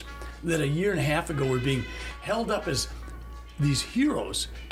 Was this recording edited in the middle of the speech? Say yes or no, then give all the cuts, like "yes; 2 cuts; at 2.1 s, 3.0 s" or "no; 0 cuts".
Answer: no; 0 cuts